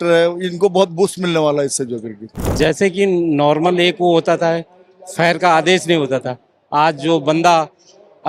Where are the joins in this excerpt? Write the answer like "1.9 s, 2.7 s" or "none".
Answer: 2.5 s